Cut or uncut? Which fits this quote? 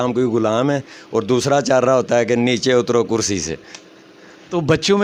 uncut